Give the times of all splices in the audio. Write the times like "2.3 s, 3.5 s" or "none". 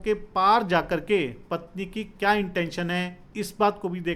none

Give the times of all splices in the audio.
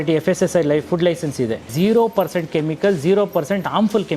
1.7 s

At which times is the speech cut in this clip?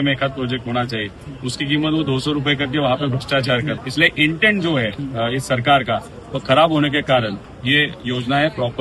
3.8 s, 5.0 s, 7.5 s

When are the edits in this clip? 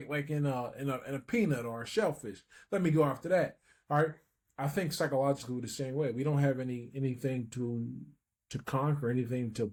none

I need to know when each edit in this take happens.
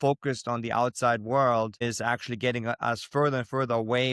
none

